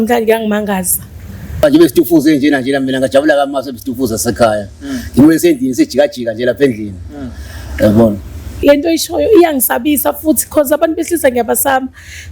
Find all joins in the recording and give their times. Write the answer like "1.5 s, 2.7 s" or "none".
1.6 s, 8.5 s